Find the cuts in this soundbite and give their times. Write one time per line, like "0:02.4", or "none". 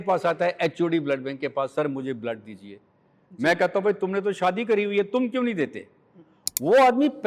none